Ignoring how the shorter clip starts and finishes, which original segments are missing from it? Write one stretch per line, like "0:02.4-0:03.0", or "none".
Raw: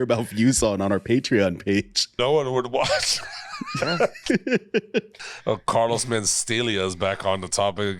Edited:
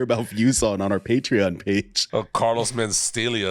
0:02.0-0:05.3